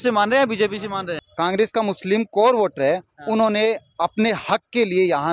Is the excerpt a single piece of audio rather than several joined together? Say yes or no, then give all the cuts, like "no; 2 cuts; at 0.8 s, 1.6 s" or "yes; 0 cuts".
no; 1 cut; at 1.0 s